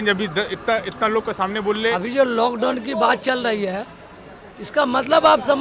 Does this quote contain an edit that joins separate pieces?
yes; 1 cut; at 1.9 s

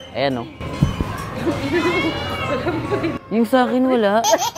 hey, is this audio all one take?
yes; 0 cuts

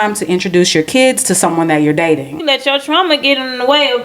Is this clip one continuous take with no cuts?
no; 1 cut; at 2.3 s

